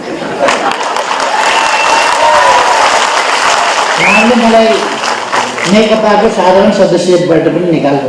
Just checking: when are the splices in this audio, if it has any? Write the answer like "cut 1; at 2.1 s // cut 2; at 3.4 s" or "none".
none